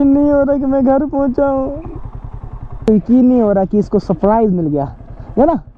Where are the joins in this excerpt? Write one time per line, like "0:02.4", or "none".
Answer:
0:02.9